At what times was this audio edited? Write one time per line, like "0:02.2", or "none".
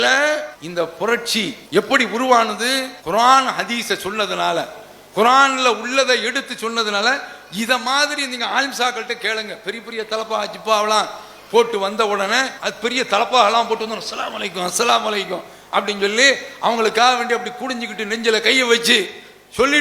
0:01.6
0:02.9